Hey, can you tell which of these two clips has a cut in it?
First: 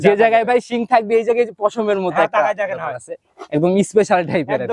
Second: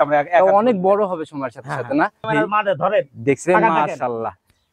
second; 1 cut; at 2.3 s

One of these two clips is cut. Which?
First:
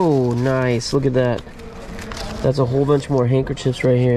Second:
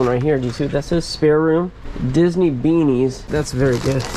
second; 1 cut; at 3.2 s

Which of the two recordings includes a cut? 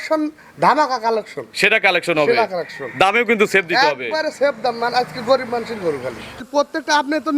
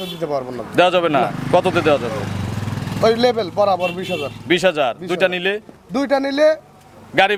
first; 1 cut; at 6.4 s

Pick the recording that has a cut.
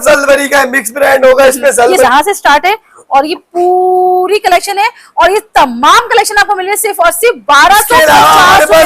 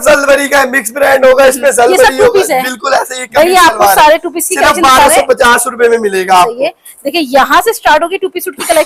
first; 1 cut; at 2.0 s

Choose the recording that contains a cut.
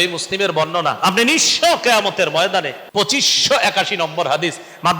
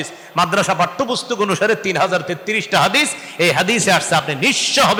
first; 1 cut; at 2.8 s

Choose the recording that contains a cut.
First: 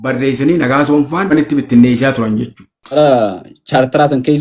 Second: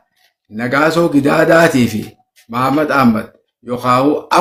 first; 2 cuts; at 1.3 s, 2.9 s

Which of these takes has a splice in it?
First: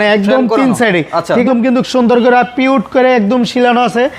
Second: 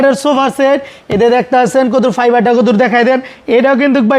first; 1 cut; at 1.4 s

